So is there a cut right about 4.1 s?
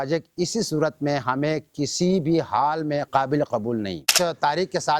yes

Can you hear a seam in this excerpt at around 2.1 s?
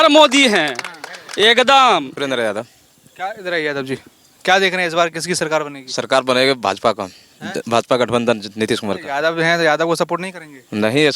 yes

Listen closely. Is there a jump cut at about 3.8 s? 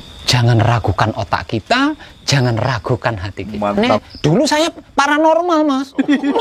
yes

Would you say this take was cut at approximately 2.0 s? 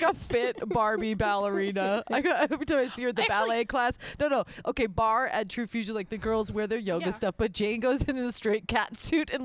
no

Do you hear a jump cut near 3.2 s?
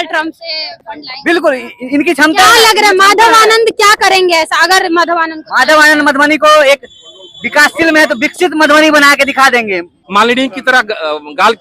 no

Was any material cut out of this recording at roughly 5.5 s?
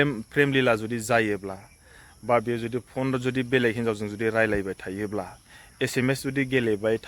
no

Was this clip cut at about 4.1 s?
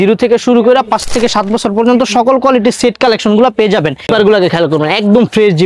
yes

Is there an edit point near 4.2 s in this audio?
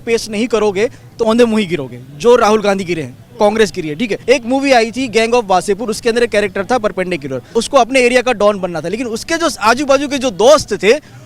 yes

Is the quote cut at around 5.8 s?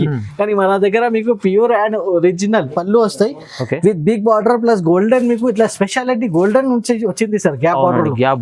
no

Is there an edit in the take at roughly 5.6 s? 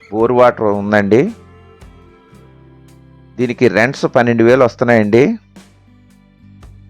no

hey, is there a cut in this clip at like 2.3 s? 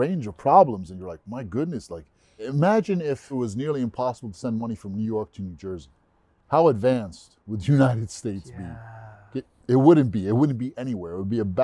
yes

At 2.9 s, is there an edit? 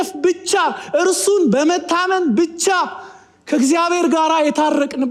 no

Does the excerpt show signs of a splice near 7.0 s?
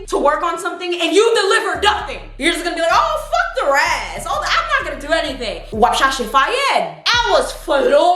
yes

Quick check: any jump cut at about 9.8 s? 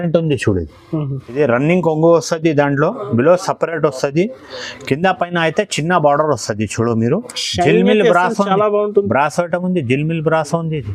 no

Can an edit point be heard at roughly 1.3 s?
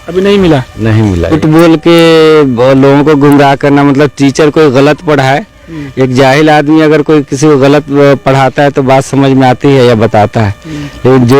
yes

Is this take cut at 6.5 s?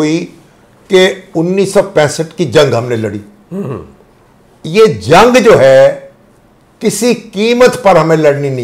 no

